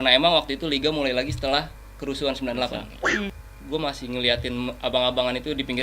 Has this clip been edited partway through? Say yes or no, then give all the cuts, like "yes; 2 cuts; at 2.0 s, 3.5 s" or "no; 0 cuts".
yes; 1 cut; at 3.3 s